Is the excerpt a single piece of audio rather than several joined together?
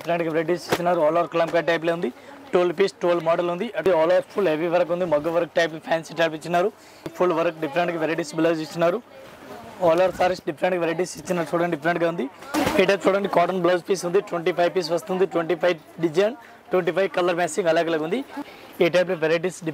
no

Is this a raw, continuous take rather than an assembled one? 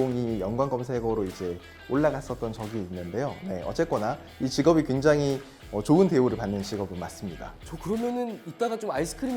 yes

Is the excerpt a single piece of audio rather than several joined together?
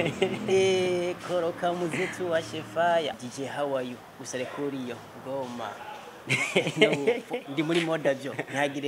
no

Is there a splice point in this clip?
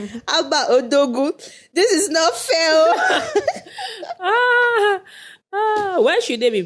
no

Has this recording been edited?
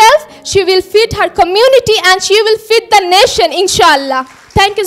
no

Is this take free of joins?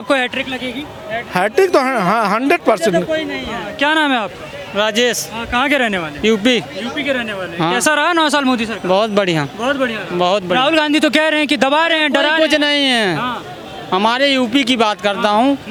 yes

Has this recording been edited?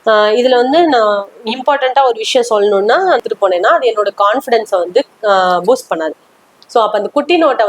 yes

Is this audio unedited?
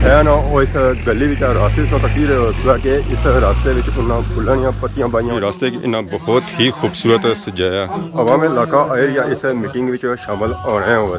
no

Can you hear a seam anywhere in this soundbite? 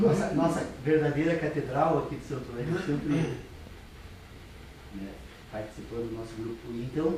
no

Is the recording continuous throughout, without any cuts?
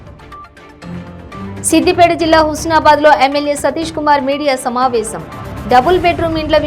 no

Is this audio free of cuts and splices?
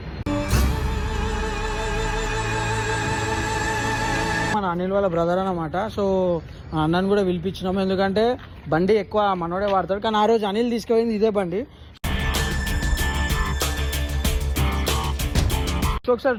yes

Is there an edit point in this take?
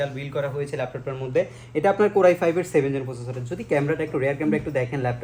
no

